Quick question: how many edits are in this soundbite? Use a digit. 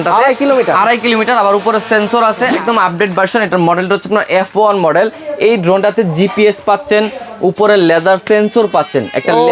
1